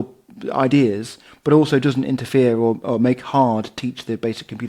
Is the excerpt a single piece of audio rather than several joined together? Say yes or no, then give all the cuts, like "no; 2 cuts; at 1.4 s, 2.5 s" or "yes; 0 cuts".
yes; 0 cuts